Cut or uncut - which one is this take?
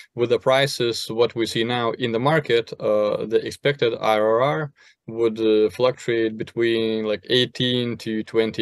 uncut